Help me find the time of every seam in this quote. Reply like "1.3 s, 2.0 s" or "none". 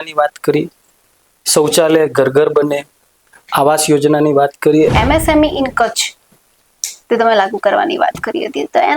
4.9 s